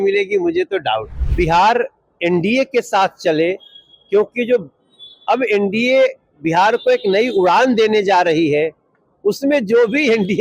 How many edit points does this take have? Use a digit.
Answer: 1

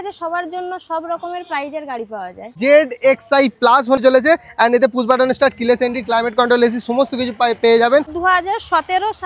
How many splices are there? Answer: 3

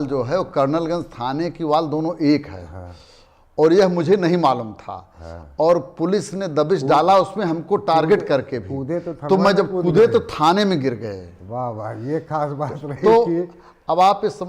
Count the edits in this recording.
0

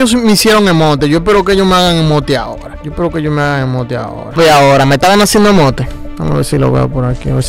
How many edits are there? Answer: 0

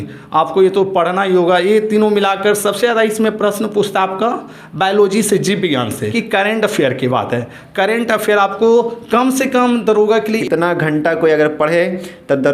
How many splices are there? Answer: 2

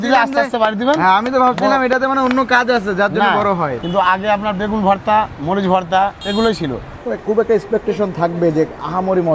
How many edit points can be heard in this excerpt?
3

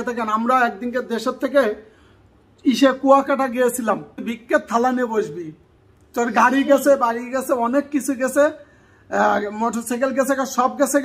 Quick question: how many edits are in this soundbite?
1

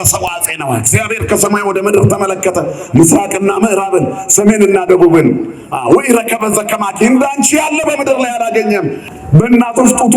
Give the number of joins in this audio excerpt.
1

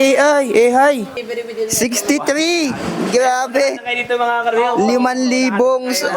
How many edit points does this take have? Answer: 1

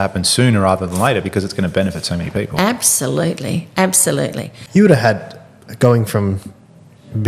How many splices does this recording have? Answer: 1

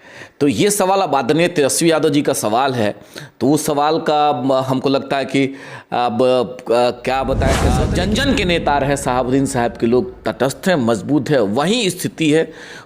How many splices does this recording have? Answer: 1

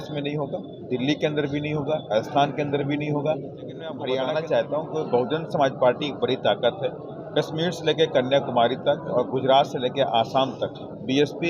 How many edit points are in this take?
1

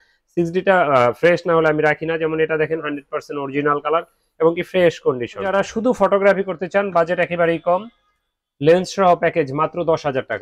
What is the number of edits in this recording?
1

